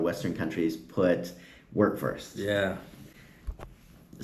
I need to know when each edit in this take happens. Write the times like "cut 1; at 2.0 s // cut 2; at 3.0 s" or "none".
none